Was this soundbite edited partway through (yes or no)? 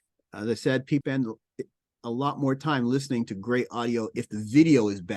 yes